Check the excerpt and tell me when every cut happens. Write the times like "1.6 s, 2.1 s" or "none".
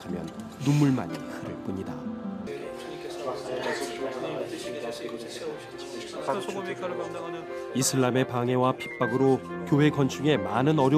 2.5 s